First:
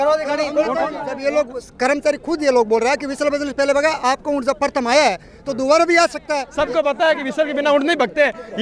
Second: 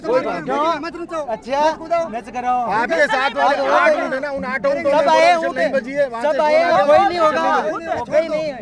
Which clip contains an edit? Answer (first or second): first